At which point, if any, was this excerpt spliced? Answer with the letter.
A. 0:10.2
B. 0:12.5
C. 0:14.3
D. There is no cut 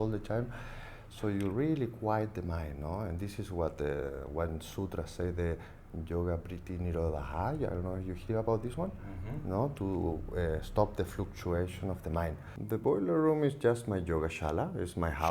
B